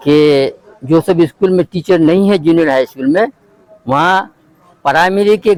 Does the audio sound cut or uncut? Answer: uncut